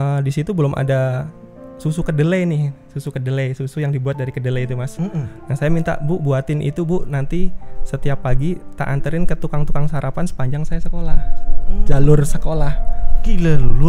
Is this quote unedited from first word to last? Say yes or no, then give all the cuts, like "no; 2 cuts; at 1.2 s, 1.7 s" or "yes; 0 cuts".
yes; 0 cuts